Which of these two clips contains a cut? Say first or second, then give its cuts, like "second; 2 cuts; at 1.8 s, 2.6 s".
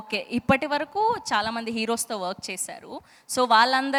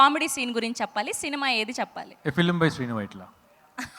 second; 1 cut; at 2.1 s